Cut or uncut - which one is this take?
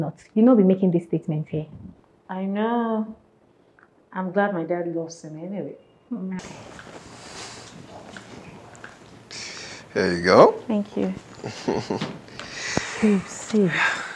cut